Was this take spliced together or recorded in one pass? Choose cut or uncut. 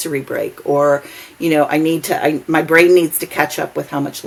uncut